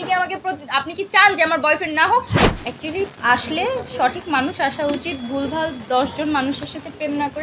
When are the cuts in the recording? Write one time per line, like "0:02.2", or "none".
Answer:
0:02.4